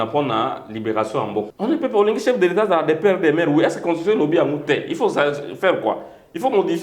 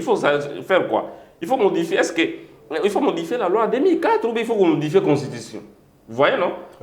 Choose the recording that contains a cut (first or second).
first